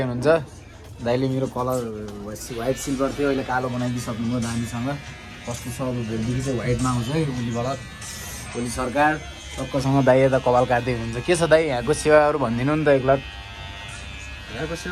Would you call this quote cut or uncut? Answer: uncut